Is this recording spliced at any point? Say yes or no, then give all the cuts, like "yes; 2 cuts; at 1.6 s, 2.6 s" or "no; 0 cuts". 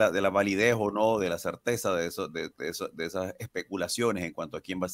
no; 0 cuts